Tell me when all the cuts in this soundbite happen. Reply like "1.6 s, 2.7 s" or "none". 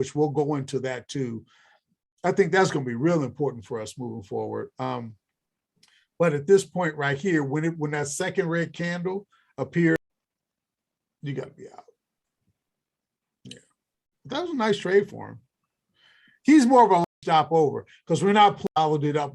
10.0 s, 17.0 s, 18.6 s